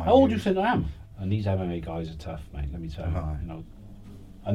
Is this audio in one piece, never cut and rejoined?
no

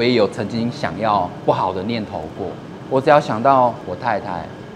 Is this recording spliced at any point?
yes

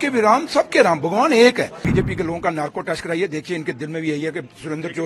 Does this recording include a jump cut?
yes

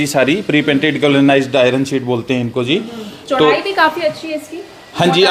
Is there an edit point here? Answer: no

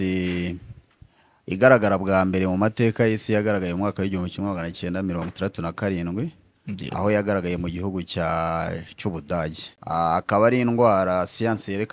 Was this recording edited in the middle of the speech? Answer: yes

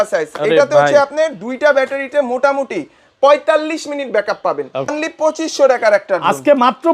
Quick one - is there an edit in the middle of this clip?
yes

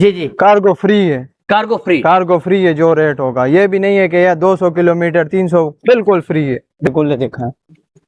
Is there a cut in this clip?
yes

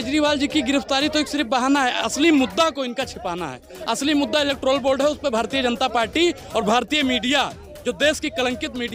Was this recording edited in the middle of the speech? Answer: no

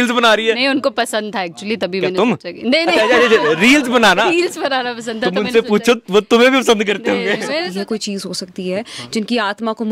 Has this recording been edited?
yes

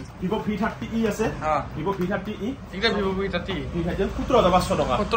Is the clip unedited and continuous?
yes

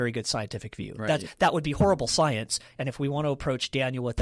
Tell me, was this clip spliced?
no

